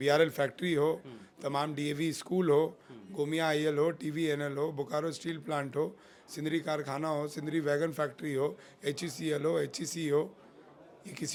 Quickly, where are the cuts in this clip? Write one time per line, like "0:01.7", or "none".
none